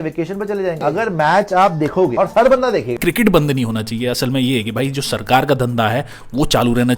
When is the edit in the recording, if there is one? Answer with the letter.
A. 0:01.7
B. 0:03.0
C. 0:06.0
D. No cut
B